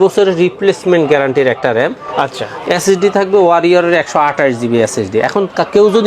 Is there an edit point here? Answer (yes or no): no